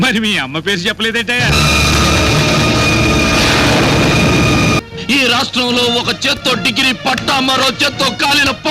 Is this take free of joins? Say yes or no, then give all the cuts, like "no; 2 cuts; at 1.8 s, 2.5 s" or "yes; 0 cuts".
no; 1 cut; at 4.8 s